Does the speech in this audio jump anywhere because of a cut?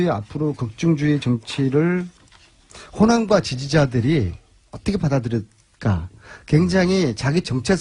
no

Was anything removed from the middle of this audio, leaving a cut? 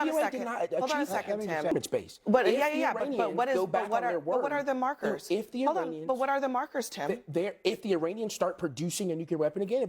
yes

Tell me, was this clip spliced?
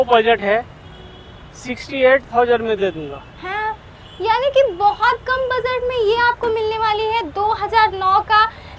no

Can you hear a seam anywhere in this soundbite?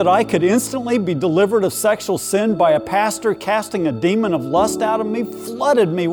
no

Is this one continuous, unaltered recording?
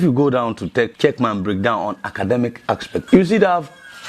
no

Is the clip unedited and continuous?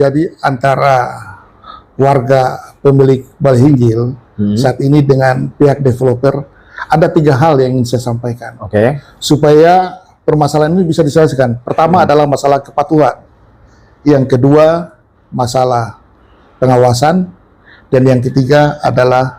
yes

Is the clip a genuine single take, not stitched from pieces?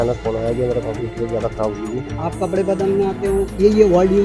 no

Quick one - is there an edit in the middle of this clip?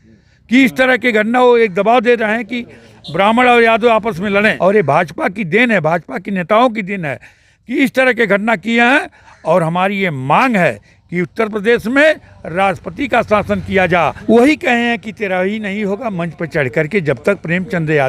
yes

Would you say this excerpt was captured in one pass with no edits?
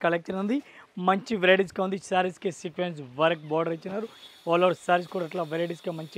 yes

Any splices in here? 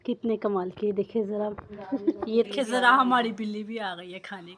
yes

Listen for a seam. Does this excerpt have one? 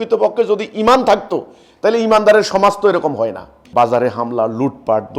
yes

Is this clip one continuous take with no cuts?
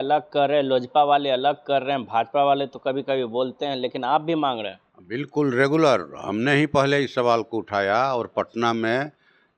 yes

